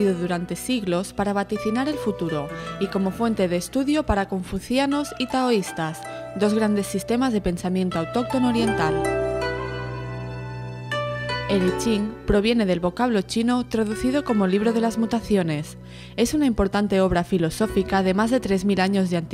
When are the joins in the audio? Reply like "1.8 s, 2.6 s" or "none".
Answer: none